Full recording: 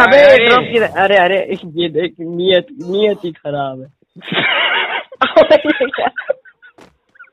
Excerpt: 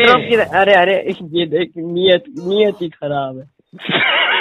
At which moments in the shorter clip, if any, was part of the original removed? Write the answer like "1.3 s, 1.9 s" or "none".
none